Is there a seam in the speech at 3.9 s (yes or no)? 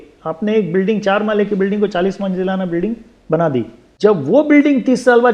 yes